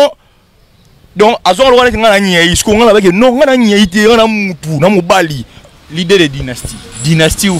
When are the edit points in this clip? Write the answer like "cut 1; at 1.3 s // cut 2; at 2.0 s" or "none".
cut 1; at 5.7 s